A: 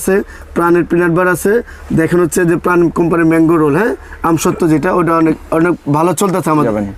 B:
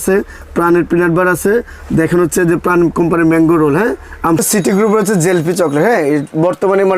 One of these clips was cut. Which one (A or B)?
B